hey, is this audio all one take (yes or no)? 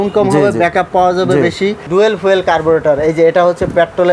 no